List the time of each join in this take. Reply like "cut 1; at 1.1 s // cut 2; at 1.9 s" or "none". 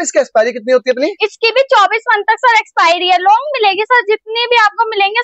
none

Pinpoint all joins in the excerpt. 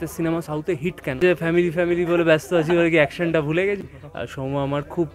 cut 1; at 1.2 s // cut 2; at 3.8 s

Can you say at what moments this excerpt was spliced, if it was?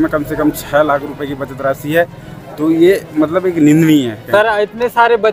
cut 1; at 4.2 s

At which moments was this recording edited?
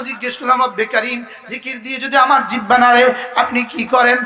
none

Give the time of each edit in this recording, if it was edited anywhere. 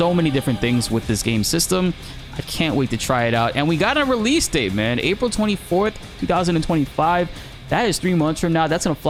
none

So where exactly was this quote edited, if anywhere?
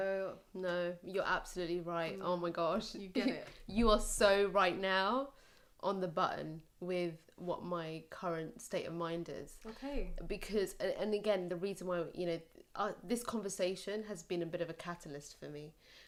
none

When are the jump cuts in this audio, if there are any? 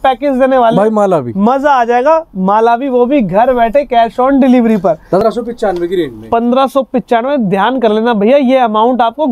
cut 1; at 5.2 s

